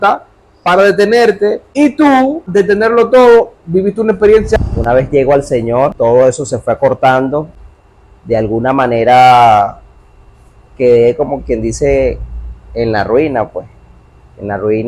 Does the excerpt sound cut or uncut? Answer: cut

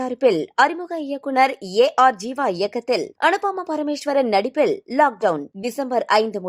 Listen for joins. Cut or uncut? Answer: uncut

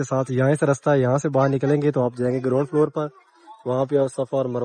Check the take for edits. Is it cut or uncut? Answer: uncut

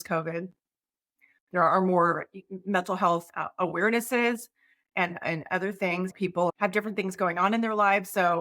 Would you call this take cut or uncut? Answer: cut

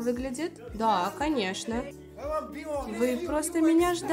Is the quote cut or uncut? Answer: cut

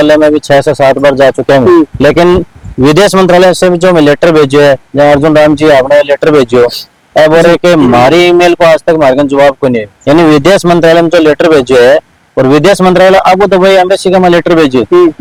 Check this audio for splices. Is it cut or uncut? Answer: uncut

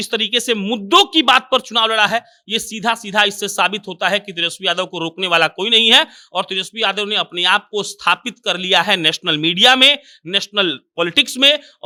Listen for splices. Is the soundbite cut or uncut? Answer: uncut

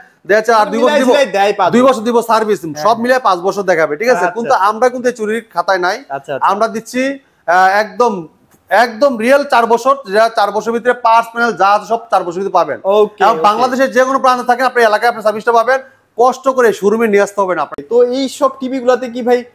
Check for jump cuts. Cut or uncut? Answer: cut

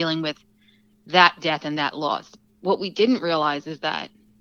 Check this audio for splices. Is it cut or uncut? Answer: uncut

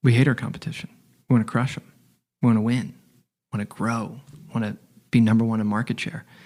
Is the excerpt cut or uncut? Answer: uncut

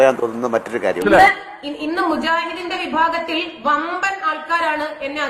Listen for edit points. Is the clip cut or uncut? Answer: cut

